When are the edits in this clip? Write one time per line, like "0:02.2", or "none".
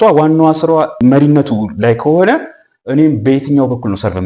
0:00.9